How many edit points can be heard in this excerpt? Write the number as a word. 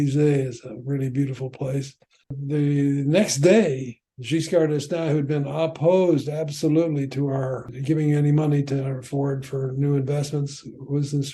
two